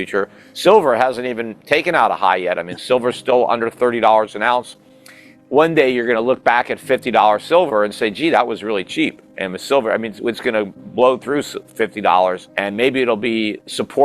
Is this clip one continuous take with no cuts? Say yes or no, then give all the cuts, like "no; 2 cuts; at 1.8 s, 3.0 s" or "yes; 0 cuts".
no; 1 cut; at 5.4 s